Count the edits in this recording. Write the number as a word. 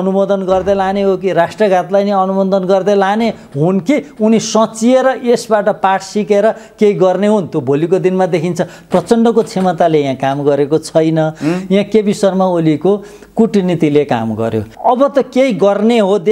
two